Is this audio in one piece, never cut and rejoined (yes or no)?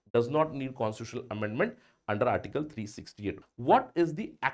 no